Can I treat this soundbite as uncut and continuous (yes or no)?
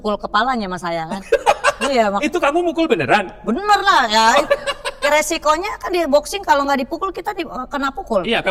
yes